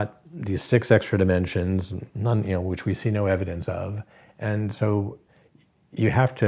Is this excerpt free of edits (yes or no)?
no